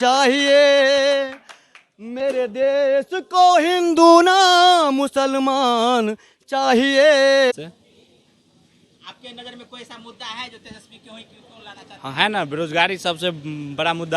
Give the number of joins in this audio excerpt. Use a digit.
1